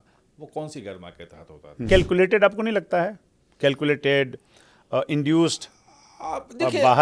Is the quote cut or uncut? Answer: cut